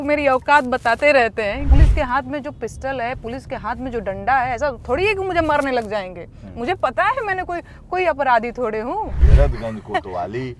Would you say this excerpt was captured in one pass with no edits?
no; 2 cuts; at 1.7 s, 9.2 s

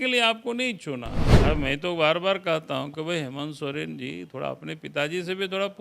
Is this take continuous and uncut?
no; 1 cut; at 1.2 s

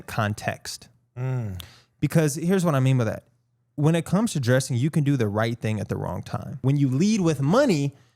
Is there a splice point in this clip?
yes; 1 cut; at 6.6 s

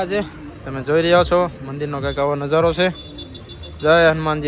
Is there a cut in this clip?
no; 0 cuts

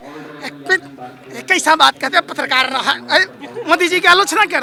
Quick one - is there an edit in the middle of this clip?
no; 0 cuts

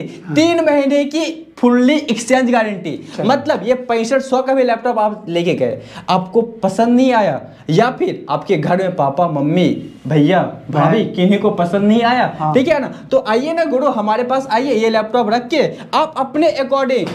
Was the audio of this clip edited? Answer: no; 0 cuts

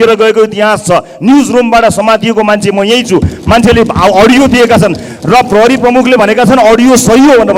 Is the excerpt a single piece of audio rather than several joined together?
yes; 0 cuts

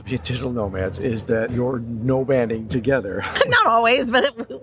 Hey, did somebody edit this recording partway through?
yes; 2 cuts; at 1.5 s, 3.2 s

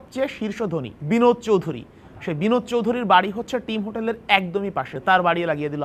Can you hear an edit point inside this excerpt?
yes; 2 cuts; at 0.9 s, 4.9 s

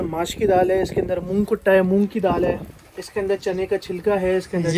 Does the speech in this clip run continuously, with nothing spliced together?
yes; 0 cuts

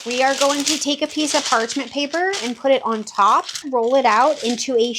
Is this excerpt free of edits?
no; 1 cut; at 3.6 s

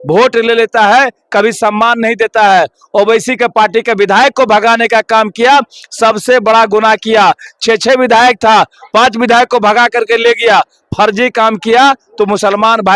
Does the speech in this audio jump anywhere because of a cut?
no; 0 cuts

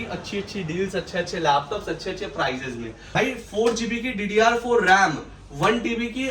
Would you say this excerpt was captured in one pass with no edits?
no; 1 cut; at 2.9 s

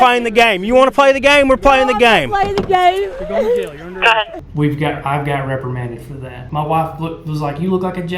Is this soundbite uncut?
no; 2 cuts; at 4.4 s, 6.4 s

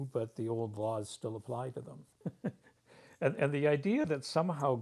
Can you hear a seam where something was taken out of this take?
yes; 1 cut; at 2.0 s

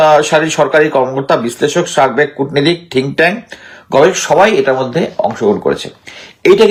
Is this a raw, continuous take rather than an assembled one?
yes; 0 cuts

